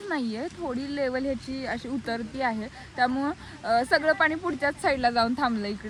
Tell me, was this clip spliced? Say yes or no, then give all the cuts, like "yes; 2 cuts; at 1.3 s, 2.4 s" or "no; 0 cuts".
no; 0 cuts